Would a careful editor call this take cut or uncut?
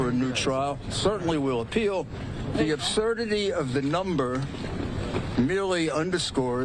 uncut